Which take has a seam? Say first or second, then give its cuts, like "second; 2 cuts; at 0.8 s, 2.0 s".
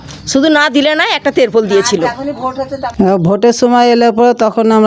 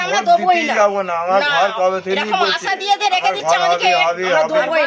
first; 1 cut; at 2.8 s